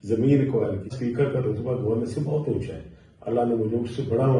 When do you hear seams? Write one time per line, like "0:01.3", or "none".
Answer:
0:00.9